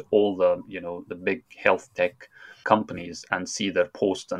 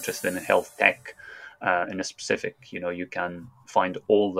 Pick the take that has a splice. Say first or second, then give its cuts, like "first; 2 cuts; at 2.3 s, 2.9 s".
first; 1 cut; at 2.6 s